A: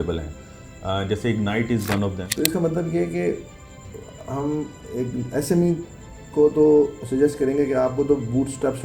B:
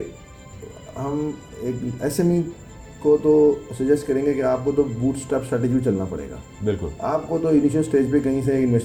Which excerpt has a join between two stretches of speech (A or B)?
A